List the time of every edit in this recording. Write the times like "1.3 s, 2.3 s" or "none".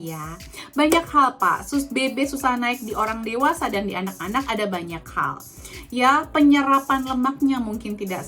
none

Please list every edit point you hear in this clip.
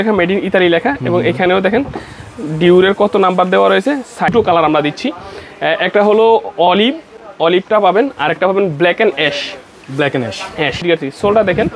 4.3 s, 10.8 s

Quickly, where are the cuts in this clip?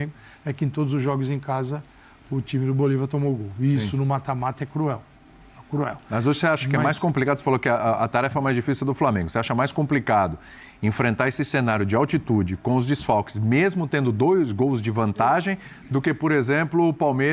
none

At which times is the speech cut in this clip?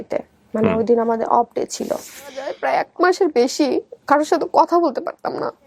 2.5 s

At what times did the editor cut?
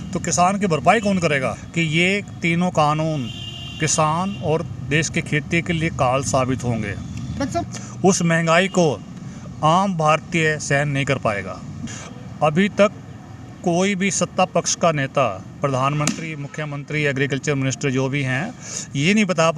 1.6 s, 7.7 s, 11.7 s

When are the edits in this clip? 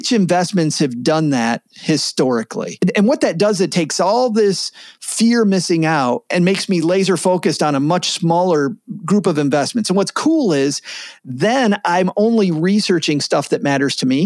2.8 s, 6.2 s

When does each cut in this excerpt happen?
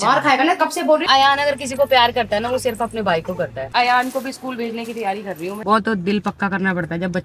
1.0 s, 3.6 s, 5.6 s

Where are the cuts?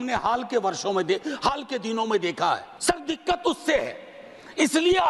2.7 s

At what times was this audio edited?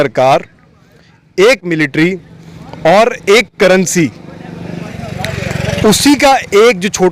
none

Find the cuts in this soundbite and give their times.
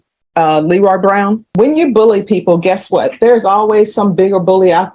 1.5 s

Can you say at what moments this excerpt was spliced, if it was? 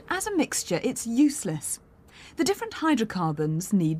none

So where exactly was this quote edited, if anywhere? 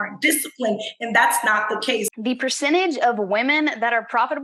2.1 s

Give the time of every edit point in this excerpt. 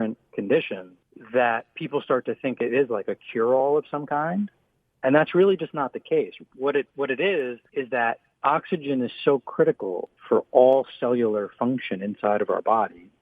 none

